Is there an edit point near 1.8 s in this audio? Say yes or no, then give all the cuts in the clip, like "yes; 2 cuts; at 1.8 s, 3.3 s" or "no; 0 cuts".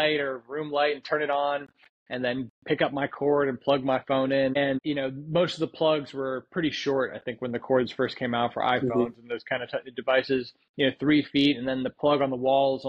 no; 1 cut; at 4.7 s